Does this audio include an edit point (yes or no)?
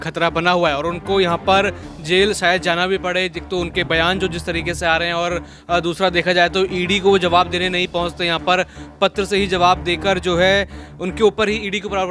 no